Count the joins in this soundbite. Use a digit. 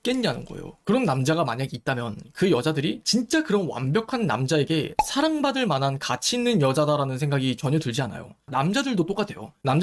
2